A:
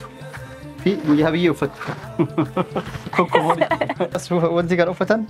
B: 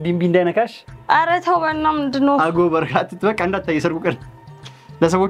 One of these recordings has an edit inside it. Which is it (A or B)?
A